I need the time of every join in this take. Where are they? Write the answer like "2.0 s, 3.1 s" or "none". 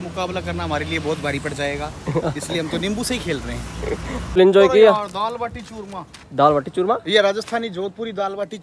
4.4 s